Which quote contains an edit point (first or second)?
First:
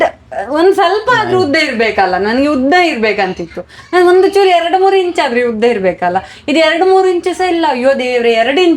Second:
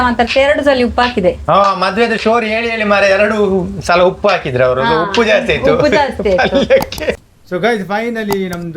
second